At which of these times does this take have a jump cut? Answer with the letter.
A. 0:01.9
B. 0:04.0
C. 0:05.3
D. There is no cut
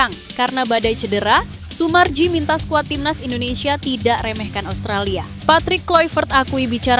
C